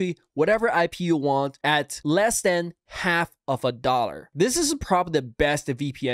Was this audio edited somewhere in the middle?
no; 0 cuts

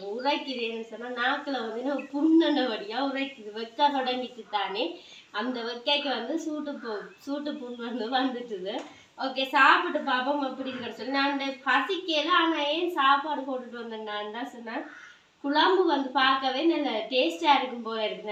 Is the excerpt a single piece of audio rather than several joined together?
yes; 0 cuts

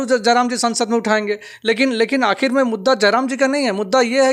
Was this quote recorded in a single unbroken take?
yes; 0 cuts

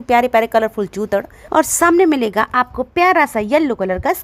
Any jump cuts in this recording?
no; 0 cuts

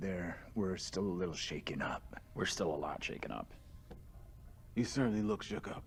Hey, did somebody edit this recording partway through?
no; 0 cuts

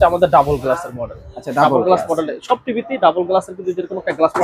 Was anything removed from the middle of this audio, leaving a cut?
no; 0 cuts

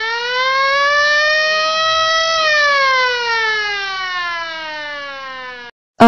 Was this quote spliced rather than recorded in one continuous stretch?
no; 0 cuts

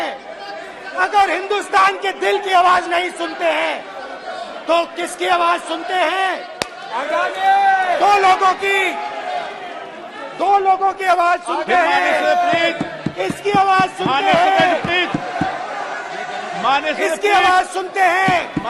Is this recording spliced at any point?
no; 0 cuts

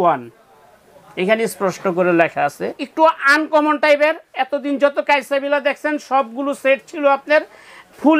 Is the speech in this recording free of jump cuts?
no; 1 cut; at 2.7 s

